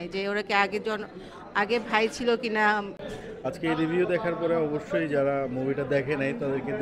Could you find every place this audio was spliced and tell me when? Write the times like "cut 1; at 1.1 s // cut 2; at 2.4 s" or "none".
cut 1; at 2.9 s